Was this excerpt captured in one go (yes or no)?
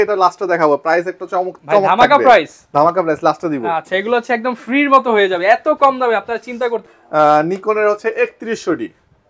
yes